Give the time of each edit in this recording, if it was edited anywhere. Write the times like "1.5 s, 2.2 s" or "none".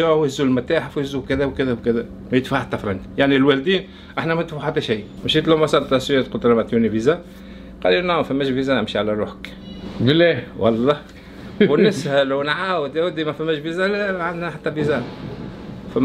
5.2 s